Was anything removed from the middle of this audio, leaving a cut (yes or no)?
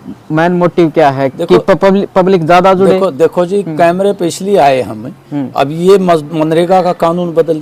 no